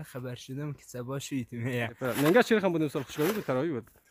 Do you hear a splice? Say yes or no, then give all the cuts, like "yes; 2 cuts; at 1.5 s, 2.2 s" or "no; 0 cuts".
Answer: yes; 1 cut; at 2.0 s